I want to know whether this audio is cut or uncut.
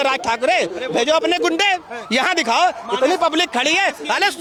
uncut